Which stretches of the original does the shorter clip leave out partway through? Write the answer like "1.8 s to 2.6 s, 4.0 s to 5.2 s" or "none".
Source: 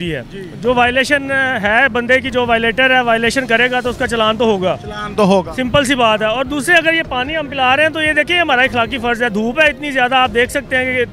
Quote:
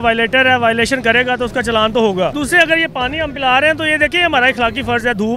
4.8 s to 6.5 s